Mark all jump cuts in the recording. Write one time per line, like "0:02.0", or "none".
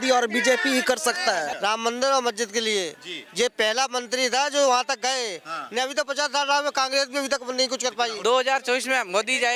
0:01.5
0:08.1